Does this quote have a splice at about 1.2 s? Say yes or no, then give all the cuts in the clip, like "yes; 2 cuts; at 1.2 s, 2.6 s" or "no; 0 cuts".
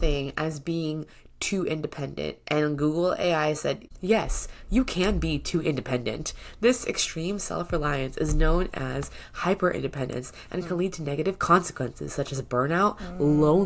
no; 1 cut; at 3.8 s